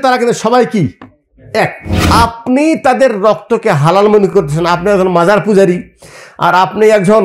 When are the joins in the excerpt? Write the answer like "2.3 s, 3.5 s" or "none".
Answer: 2.0 s